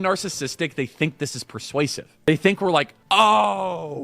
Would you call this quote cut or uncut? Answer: cut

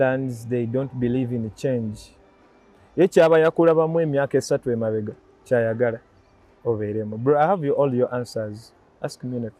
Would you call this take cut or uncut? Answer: uncut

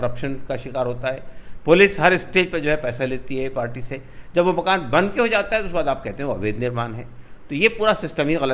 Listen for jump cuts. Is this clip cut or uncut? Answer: uncut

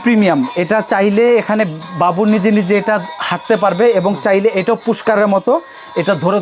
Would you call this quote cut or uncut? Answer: uncut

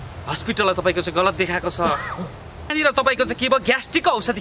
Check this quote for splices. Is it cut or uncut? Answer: cut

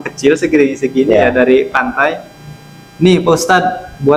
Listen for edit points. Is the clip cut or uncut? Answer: uncut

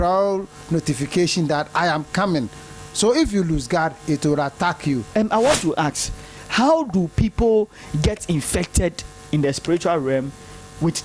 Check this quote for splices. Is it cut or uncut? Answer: cut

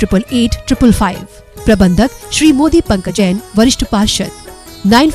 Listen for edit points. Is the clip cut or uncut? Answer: cut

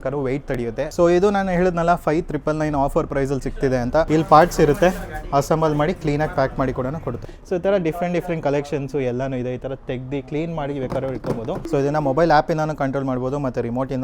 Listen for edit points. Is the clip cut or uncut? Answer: cut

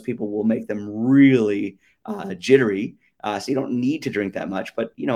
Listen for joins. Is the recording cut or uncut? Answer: uncut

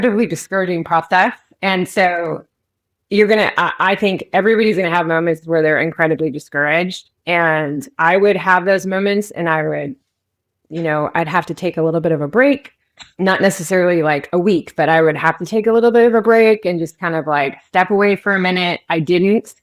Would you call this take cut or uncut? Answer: uncut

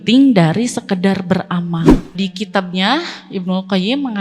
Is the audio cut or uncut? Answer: cut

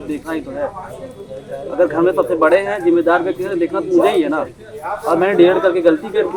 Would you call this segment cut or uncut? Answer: uncut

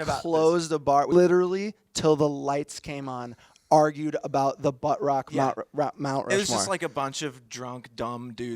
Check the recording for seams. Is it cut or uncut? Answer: cut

